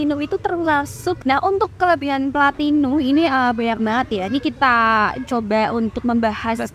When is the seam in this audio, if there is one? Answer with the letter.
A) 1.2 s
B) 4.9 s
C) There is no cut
A